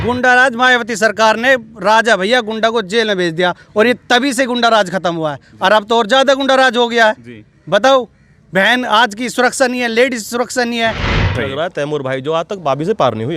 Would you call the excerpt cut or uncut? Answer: cut